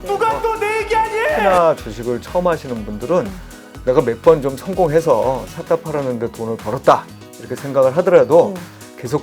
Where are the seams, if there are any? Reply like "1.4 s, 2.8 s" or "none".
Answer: none